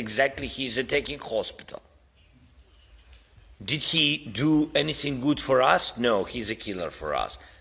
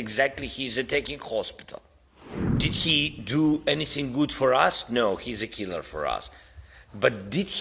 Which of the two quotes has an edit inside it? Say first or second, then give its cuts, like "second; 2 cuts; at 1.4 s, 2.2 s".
second; 1 cut; at 2.5 s